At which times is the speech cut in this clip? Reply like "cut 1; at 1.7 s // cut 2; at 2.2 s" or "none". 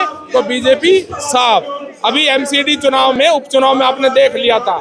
none